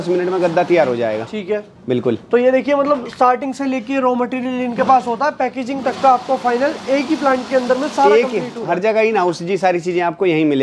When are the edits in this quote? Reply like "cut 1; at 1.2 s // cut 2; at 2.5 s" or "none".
none